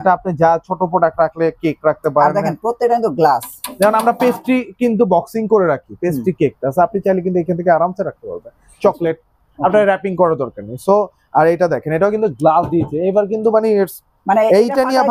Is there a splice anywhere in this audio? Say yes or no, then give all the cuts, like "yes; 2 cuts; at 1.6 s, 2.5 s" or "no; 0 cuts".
no; 0 cuts